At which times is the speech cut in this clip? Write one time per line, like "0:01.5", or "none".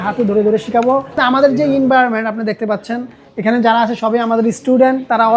0:01.2